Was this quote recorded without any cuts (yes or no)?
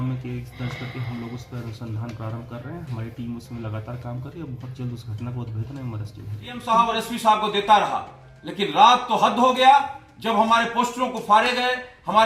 no